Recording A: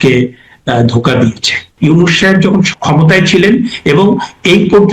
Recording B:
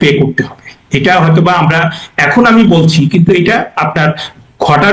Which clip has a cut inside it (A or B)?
A